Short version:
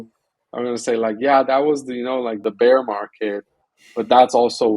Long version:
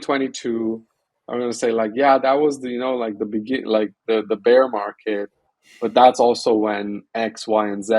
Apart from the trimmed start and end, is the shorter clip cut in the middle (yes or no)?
yes